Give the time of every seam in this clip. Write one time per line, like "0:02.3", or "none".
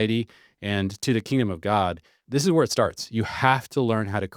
0:02.2